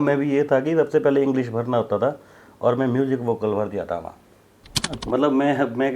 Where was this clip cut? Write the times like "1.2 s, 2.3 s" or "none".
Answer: 5.0 s